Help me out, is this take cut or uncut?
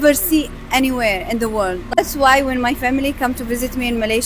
cut